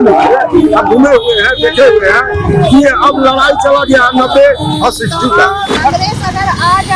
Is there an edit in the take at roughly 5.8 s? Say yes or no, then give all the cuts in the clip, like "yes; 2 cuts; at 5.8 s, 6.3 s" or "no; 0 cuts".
yes; 1 cut; at 5.8 s